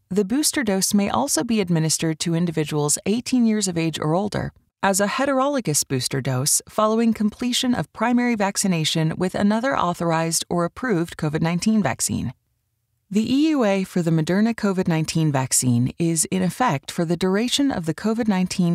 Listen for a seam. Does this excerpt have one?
no; 0 cuts

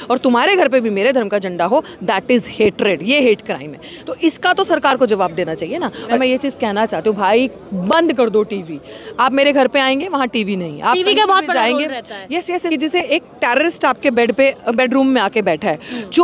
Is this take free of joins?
no; 2 cuts; at 6.2 s, 12.7 s

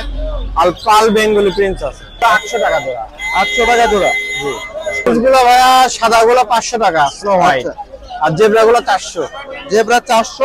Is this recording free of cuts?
no; 2 cuts; at 2.2 s, 5.1 s

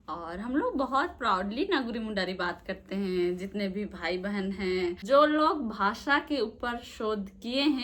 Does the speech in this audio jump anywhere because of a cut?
yes; 1 cut; at 5.0 s

